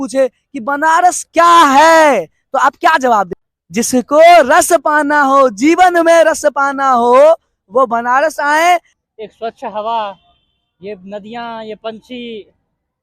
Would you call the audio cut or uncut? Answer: cut